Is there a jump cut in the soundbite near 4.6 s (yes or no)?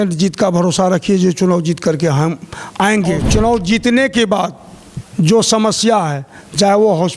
no